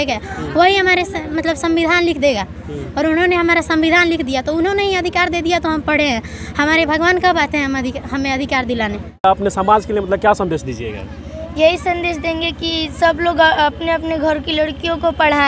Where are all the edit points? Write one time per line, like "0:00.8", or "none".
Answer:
0:09.2